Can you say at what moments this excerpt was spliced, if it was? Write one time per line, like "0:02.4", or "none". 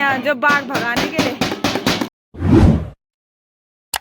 0:02.1